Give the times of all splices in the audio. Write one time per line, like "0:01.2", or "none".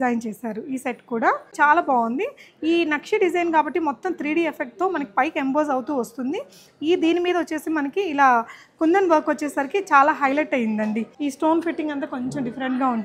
0:01.5
0:11.1